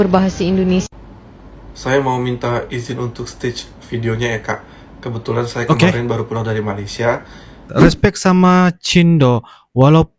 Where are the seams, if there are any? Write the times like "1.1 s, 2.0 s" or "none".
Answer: 7.6 s